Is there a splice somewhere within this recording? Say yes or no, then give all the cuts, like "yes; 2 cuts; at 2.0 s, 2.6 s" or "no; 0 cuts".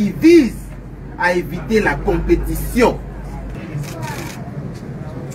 yes; 1 cut; at 3.5 s